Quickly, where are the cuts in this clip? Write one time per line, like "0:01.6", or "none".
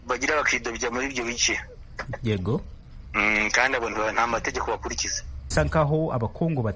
0:05.4